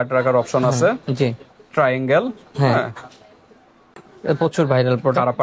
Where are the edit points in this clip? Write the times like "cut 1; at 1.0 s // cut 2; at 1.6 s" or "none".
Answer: none